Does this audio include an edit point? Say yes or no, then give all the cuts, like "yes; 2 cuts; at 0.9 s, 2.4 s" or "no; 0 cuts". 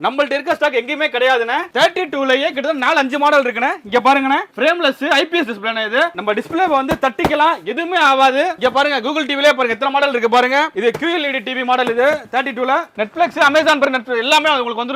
no; 0 cuts